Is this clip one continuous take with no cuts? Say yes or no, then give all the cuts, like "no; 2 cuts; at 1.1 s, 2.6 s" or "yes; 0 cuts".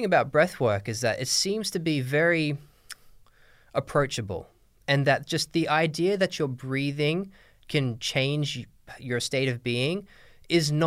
yes; 0 cuts